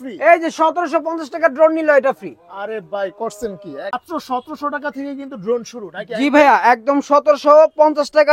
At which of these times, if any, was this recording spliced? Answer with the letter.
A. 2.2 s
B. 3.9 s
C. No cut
B